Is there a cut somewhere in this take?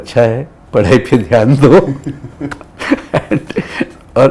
no; 0 cuts

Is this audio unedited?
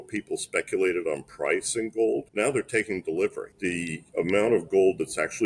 no; 2 cuts; at 2.3 s, 3.5 s

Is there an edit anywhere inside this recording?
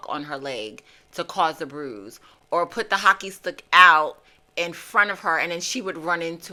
no; 0 cuts

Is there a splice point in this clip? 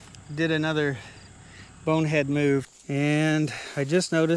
yes; 1 cut; at 2.7 s

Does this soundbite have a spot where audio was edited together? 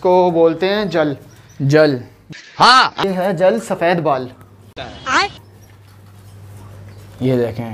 no; 0 cuts

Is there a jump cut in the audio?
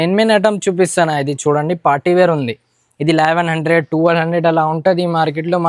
no; 0 cuts

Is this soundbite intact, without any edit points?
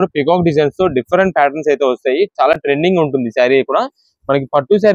yes; 0 cuts

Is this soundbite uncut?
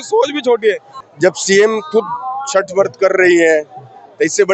no; 1 cut; at 0.9 s

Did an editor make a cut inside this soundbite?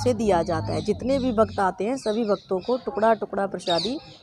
no; 0 cuts

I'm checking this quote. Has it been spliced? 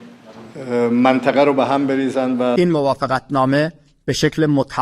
yes; 1 cut; at 2.6 s

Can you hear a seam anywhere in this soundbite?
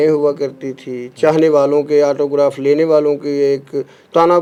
no; 0 cuts

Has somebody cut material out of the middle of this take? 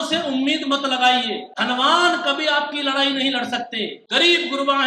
yes; 2 cuts; at 1.5 s, 4.0 s

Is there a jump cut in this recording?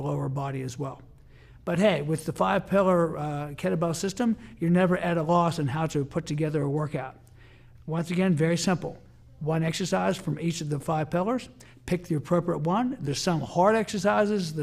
no; 0 cuts

